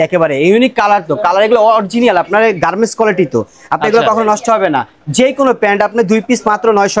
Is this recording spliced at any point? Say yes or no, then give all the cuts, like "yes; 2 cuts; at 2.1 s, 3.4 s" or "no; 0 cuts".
no; 0 cuts